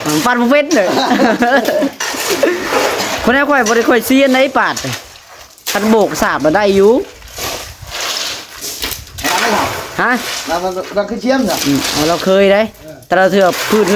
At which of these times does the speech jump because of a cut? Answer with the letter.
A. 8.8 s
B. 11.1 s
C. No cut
C